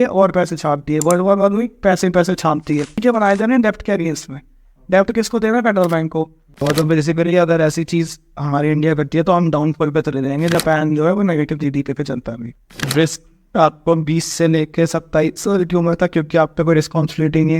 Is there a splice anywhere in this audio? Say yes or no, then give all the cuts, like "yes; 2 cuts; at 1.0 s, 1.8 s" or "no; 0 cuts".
yes; 4 cuts; at 2.9 s, 6.4 s, 10.5 s, 12.9 s